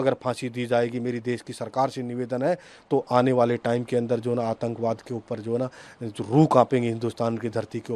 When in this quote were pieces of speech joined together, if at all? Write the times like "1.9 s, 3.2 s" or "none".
none